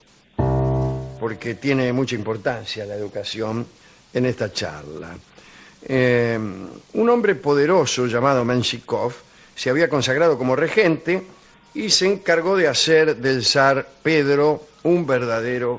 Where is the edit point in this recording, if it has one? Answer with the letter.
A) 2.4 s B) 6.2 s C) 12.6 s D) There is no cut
C